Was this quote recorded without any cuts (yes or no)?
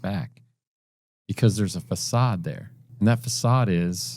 no